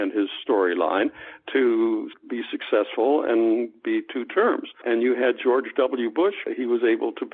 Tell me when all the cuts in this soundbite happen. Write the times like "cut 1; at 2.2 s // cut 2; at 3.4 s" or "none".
cut 1; at 2.2 s // cut 2; at 4.8 s // cut 3; at 6.4 s